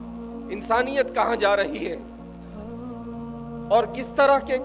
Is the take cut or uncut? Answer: cut